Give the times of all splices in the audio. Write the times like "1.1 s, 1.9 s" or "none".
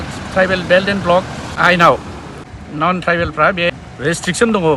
none